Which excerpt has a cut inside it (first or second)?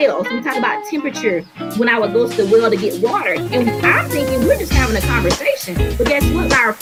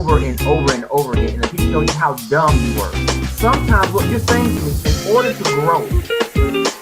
second